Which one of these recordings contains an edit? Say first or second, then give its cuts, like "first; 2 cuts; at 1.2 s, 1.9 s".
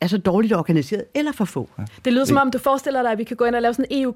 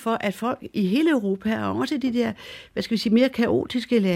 first; 1 cut; at 2.6 s